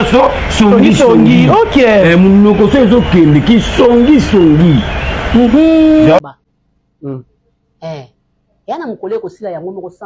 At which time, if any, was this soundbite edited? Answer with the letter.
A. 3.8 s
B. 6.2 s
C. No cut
B